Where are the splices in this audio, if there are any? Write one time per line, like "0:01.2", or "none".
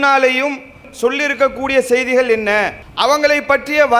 0:02.8